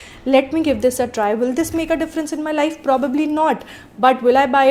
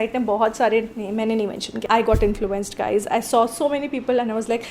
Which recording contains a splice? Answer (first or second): second